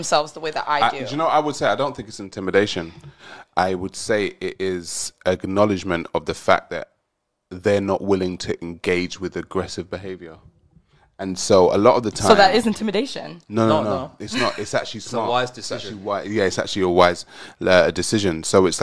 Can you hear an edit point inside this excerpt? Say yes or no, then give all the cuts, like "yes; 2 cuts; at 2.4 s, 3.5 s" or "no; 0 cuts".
yes; 2 cuts; at 1.1 s, 13.4 s